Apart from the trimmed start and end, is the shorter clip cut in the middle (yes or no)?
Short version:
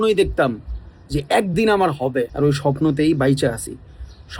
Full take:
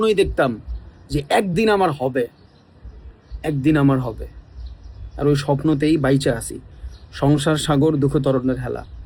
yes